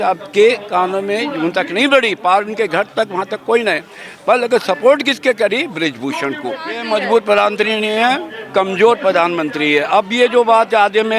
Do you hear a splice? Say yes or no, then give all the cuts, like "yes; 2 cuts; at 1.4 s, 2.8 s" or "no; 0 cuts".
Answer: yes; 1 cut; at 6.8 s